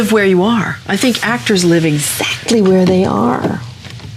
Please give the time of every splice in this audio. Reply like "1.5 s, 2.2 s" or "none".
none